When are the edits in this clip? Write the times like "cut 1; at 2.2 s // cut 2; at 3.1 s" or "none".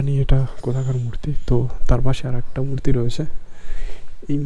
none